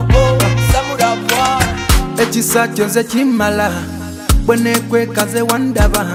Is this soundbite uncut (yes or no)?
yes